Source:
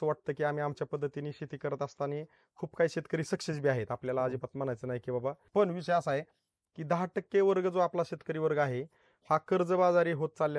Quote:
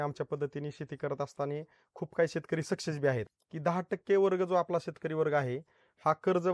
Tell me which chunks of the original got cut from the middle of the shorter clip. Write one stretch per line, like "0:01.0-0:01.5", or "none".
0:03.9-0:06.5